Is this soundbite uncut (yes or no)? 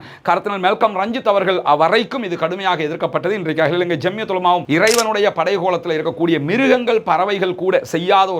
no